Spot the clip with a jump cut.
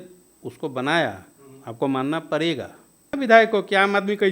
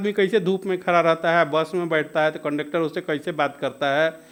first; 1 cut; at 3.1 s

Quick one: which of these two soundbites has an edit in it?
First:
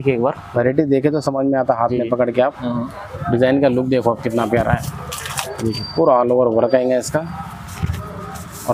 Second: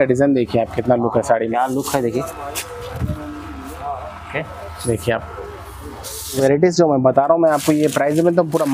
second; 1 cut; at 6.4 s

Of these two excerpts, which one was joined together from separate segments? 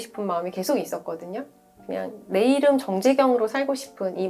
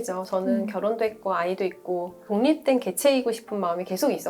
second; 1 cut; at 2.3 s

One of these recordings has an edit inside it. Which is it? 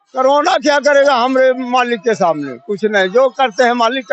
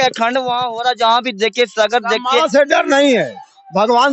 second; 1 cut; at 2.4 s

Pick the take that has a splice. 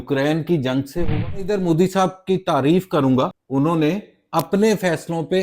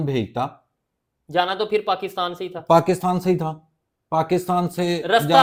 first; 2 cuts; at 1.5 s, 3.4 s

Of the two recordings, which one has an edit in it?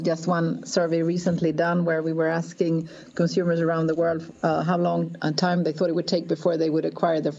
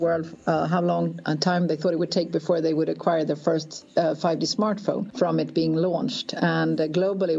second; 1 cut; at 5.1 s

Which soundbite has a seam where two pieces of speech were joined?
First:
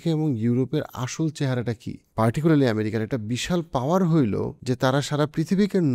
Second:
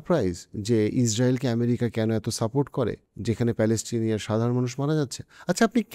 first; 2 cuts; at 2.0 s, 4.5 s

